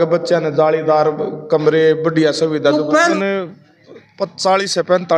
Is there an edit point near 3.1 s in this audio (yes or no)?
yes